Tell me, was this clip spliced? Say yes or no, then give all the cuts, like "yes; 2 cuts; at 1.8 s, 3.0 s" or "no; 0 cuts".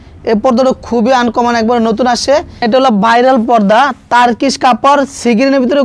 yes; 1 cut; at 2.6 s